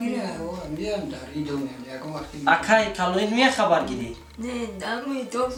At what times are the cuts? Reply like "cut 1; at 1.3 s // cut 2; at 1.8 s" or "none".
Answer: none

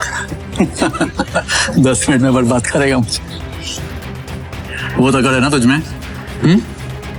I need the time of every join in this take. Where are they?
none

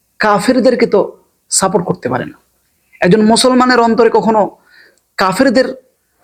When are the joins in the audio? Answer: none

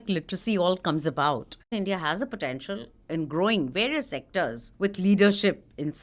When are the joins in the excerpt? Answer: cut 1; at 1.7 s // cut 2; at 4.6 s

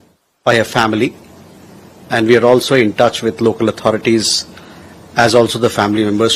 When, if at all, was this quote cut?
none

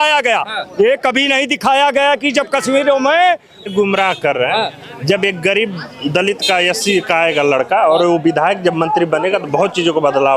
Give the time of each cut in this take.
cut 1; at 3.7 s

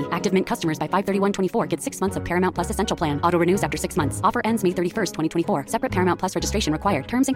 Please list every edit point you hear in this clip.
none

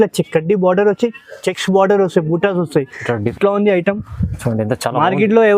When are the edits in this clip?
cut 1; at 3.3 s

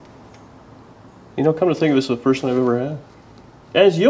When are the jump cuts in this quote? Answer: none

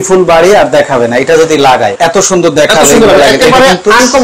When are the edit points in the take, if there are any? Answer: cut 1; at 1.9 s

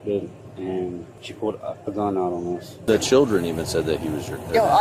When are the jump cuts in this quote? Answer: cut 1; at 2.8 s

